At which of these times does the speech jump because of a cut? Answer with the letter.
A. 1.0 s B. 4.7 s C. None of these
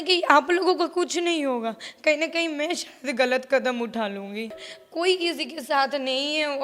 B